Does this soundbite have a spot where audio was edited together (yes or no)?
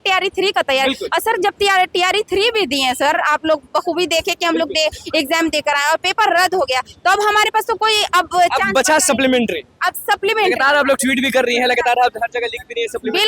no